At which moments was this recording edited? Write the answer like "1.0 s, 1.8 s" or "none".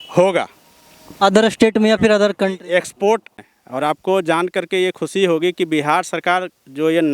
3.4 s

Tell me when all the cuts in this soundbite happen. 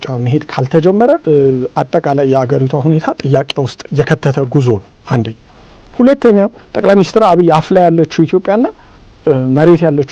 1.2 s, 3.8 s, 6.6 s

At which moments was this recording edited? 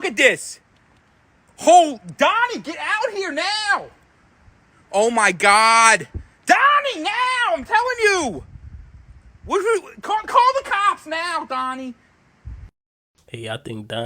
none

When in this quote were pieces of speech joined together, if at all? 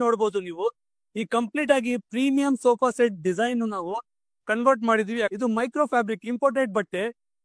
5.3 s

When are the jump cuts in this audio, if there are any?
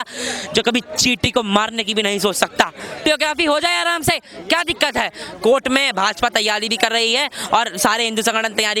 3.0 s

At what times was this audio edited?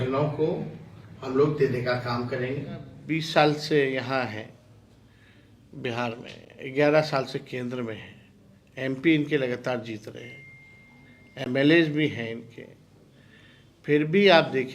3.0 s

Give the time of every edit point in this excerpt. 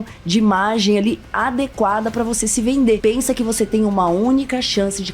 3.0 s

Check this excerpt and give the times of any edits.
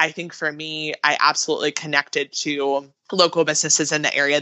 3.0 s

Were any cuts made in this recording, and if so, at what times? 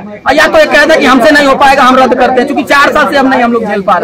none

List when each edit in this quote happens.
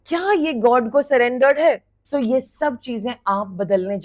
1.9 s

